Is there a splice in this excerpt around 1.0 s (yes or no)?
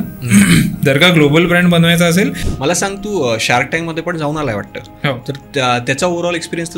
no